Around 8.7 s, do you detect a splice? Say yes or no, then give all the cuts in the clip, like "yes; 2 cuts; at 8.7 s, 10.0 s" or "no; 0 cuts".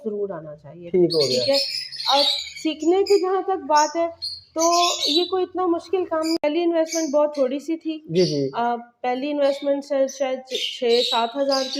no; 1 cut; at 6.4 s